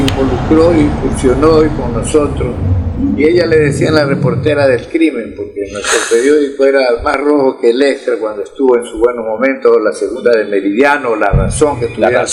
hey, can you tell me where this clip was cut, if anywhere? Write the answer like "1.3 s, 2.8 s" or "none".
none